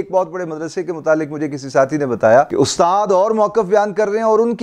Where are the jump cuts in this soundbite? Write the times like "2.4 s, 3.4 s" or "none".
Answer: none